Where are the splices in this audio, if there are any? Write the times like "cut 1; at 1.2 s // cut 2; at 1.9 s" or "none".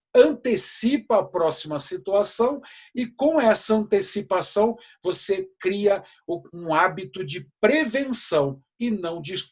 none